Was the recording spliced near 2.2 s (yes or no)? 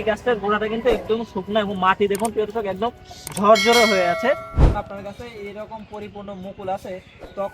no